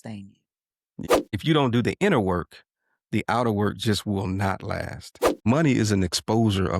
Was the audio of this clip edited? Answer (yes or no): yes